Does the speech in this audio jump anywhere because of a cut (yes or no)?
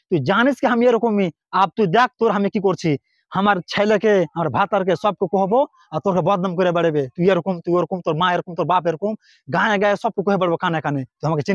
no